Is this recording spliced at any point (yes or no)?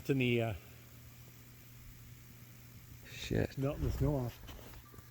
yes